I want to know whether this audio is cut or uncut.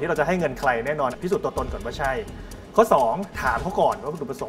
cut